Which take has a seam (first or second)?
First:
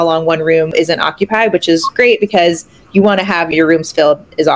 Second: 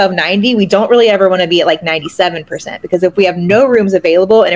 first